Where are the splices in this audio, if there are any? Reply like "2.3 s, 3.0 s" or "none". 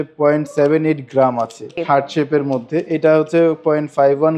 1.7 s